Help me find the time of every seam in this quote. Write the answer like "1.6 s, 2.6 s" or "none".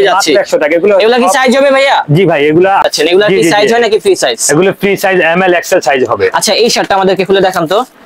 2.9 s

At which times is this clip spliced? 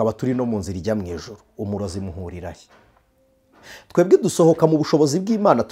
none

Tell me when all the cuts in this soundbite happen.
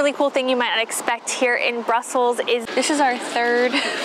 2.6 s

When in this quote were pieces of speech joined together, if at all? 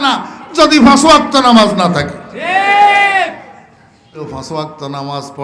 4.3 s

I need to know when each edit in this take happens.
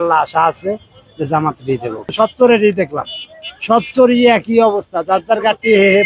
2.1 s

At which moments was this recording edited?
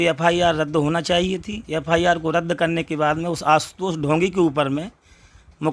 none

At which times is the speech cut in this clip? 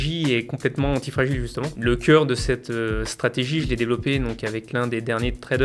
1.8 s

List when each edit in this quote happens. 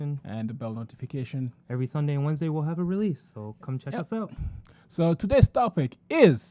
0.9 s

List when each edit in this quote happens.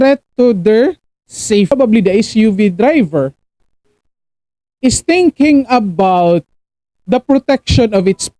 1.7 s

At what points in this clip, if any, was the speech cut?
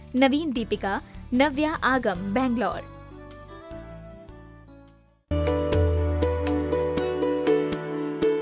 2.4 s

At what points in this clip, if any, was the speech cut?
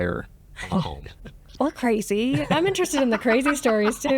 1.5 s

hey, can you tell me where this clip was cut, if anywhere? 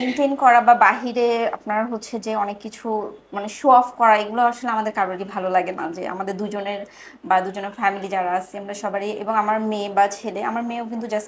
none

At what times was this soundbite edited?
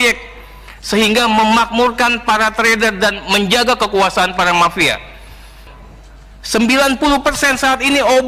5.7 s

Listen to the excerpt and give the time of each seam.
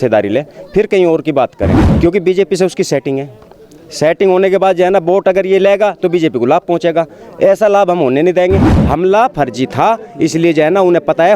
1.8 s, 8.7 s

